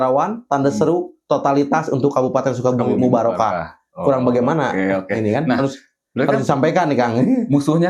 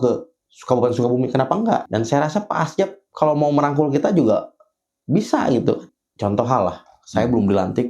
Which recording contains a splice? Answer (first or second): second